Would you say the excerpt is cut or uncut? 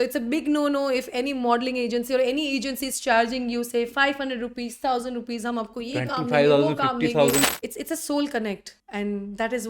cut